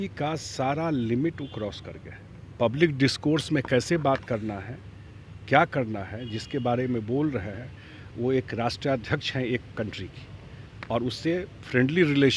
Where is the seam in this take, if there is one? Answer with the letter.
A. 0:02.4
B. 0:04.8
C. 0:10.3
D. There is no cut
D